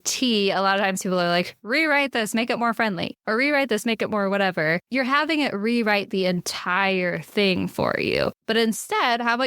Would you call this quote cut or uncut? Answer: cut